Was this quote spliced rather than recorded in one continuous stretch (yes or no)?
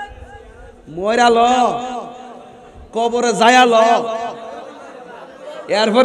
no